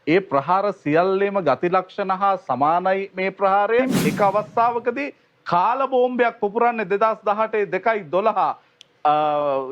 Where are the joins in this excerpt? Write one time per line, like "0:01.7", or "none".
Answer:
0:03.9